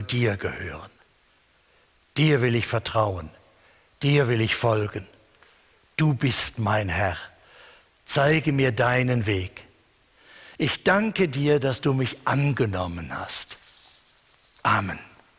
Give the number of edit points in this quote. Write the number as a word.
zero